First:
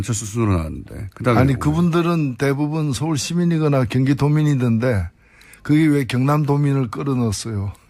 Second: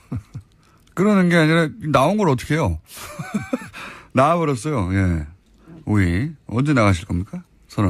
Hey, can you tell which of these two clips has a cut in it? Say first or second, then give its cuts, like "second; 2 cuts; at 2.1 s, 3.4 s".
first; 1 cut; at 5.8 s